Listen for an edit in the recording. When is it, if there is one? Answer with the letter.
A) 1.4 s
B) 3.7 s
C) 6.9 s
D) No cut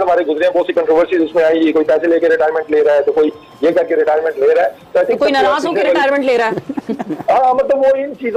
D